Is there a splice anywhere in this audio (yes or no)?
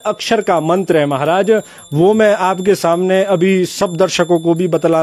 no